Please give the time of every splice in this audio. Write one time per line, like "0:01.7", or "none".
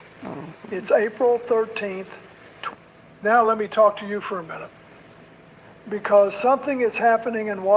0:02.5